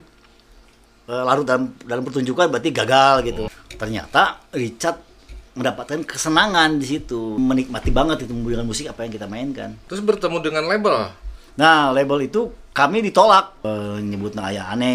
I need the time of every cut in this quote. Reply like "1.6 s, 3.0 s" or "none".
3.5 s, 7.4 s, 9.9 s, 13.7 s